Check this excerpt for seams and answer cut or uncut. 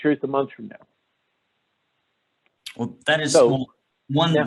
uncut